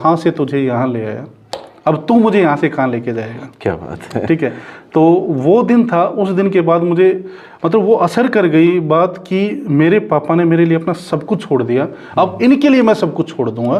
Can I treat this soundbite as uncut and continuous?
yes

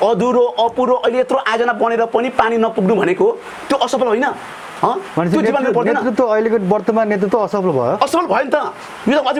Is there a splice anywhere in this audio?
no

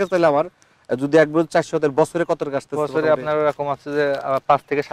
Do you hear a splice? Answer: no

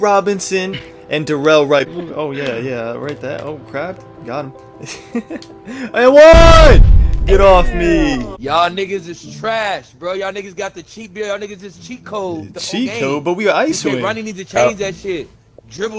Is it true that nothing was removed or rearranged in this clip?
no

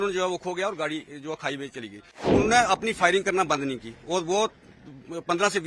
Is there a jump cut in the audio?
yes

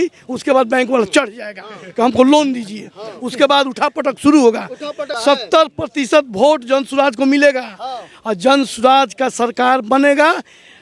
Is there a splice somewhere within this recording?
yes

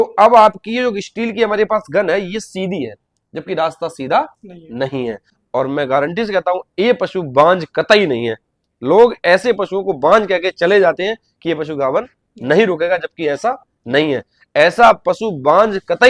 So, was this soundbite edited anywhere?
yes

